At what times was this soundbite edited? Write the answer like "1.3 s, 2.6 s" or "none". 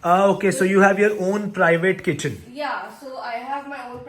none